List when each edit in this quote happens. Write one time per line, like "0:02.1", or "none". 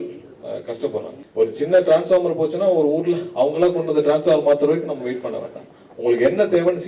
0:01.2